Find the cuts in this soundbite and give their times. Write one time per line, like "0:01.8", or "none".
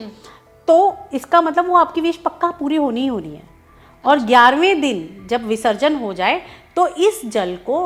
none